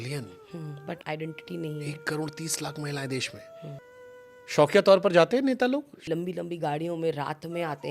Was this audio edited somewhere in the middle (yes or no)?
yes